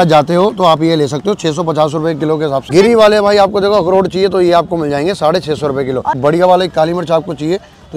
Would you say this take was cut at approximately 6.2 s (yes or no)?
yes